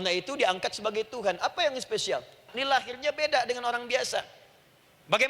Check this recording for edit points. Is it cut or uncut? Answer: cut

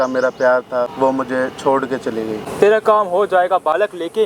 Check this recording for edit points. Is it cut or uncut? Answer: cut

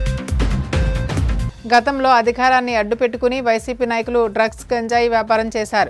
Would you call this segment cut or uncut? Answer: uncut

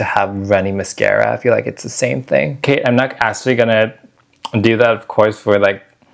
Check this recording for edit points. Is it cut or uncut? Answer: cut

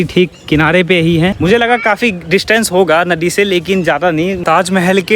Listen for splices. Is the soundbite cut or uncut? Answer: cut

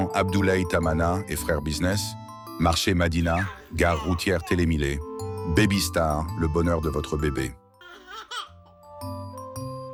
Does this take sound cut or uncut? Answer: uncut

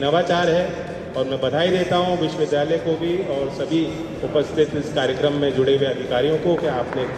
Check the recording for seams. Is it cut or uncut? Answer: uncut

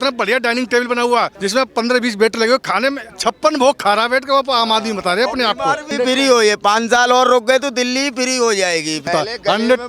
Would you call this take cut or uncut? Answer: cut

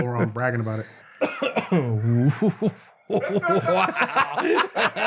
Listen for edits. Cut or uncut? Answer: uncut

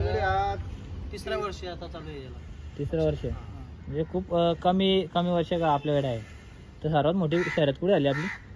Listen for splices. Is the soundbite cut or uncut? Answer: uncut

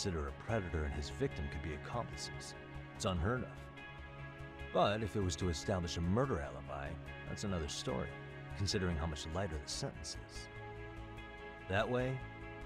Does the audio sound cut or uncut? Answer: uncut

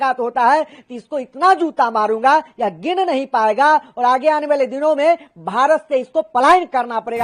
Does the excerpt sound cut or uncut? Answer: uncut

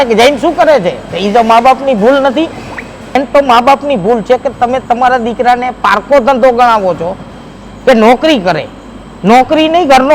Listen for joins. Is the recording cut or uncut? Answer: cut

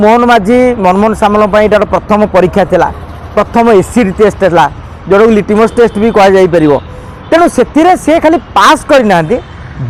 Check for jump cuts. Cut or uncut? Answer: uncut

